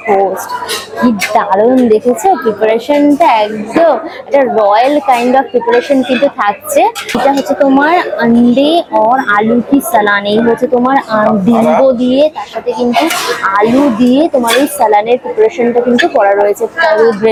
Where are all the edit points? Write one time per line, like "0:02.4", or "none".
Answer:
none